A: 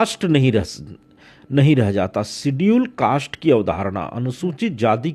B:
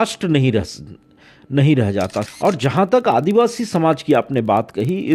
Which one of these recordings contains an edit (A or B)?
B